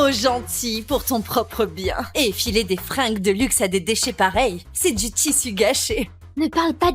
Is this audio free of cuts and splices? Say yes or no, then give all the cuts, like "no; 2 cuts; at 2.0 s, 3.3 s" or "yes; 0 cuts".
no; 1 cut; at 2.1 s